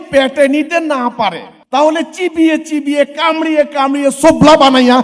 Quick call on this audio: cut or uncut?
cut